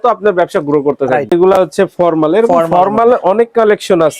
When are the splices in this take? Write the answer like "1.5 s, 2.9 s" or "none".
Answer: 1.3 s

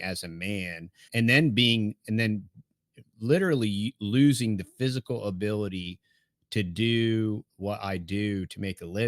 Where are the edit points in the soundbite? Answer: 1.1 s, 7.5 s

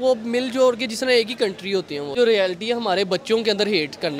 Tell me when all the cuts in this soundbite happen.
2.1 s

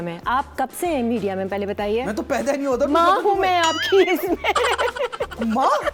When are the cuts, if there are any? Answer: none

